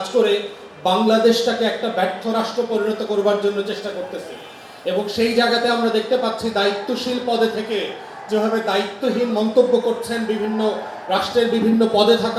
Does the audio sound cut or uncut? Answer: uncut